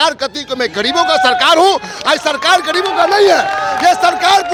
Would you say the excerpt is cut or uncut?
uncut